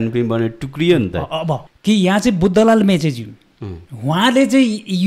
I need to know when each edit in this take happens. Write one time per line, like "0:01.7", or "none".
0:01.7